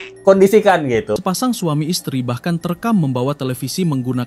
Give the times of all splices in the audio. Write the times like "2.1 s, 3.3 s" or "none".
1.1 s